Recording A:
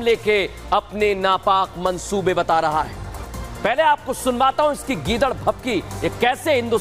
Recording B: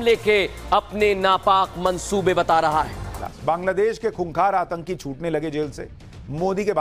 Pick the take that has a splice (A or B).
B